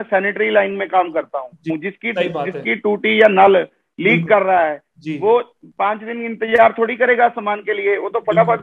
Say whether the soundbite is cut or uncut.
cut